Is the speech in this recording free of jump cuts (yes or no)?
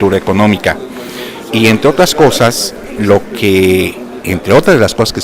yes